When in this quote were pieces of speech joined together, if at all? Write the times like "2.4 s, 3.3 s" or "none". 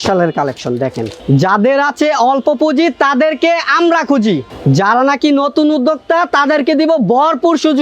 1.1 s, 4.5 s

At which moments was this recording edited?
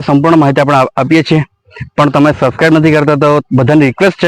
none

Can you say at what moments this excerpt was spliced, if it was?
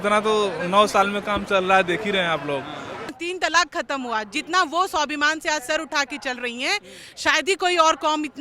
3.2 s

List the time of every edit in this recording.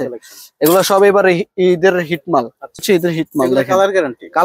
2.8 s

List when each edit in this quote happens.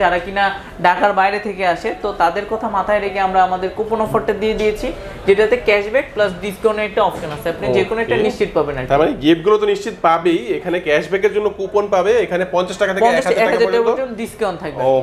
none

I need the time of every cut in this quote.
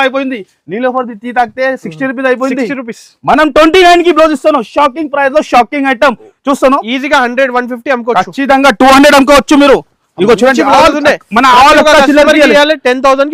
none

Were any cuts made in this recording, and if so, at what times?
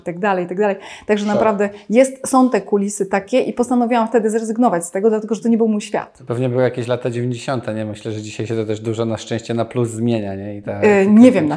none

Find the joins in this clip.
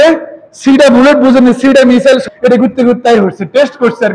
2.2 s

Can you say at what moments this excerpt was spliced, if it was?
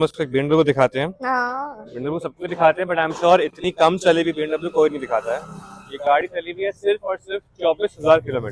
none

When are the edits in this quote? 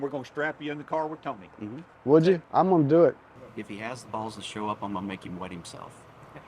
1.9 s, 2.4 s

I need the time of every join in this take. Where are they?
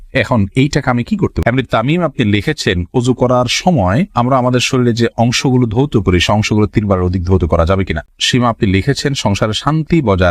1.4 s, 8.0 s

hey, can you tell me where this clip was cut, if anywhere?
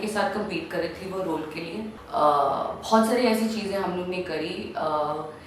2.0 s

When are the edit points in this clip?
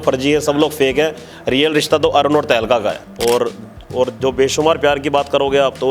3.1 s

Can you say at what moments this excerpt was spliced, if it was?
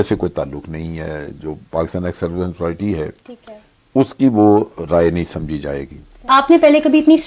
6.3 s

